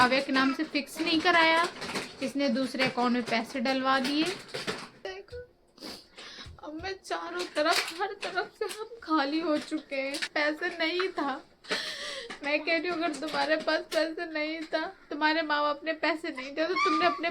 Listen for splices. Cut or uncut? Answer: cut